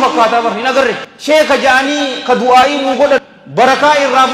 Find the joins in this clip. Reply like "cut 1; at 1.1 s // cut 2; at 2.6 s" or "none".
cut 1; at 1.1 s // cut 2; at 3.4 s